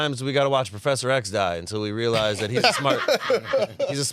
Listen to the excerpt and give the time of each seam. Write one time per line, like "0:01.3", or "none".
none

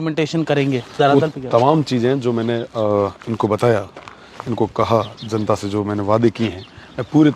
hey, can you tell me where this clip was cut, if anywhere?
none

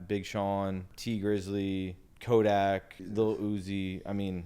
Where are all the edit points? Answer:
0:00.9
0:02.1
0:03.0

